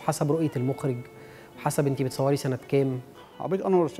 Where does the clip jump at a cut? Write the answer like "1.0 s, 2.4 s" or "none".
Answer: 3.0 s